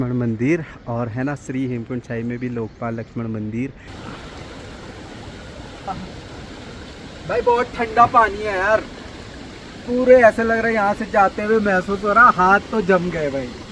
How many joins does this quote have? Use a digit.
2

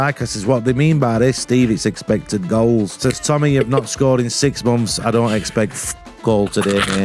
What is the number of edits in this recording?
1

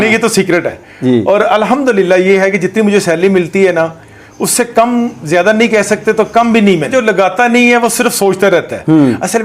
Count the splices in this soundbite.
1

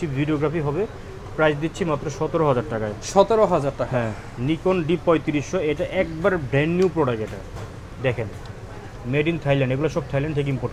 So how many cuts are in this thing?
0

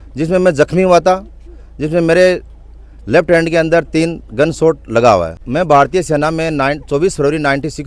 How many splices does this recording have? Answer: 1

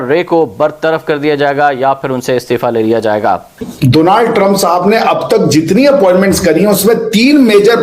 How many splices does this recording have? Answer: 1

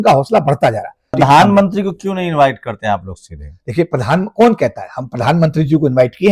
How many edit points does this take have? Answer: 1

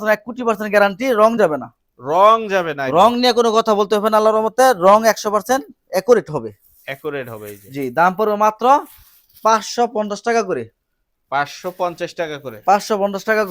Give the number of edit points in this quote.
0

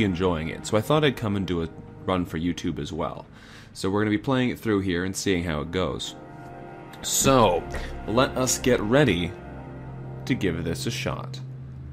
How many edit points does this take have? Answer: 0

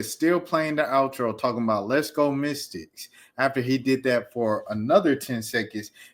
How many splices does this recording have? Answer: 0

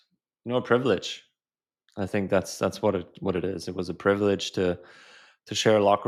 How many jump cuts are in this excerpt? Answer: 0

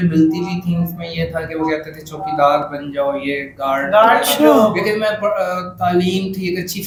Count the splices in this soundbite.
0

